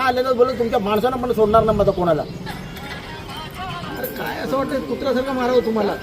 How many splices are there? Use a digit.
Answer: 1